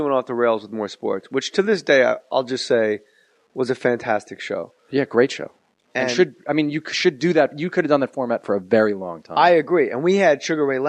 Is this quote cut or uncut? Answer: uncut